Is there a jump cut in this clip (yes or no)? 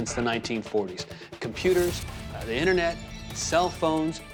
no